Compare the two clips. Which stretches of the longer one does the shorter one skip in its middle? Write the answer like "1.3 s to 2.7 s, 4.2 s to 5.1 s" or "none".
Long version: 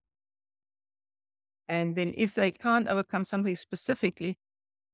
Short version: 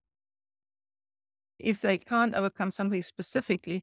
1.6 s to 2.1 s